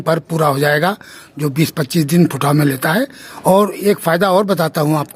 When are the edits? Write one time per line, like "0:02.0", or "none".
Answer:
0:03.2